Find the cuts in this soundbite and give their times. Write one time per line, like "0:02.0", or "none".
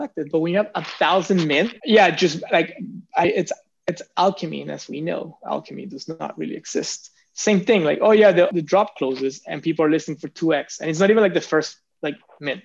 0:01.8
0:08.5